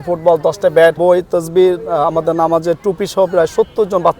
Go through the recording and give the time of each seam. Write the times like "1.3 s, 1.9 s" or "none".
1.0 s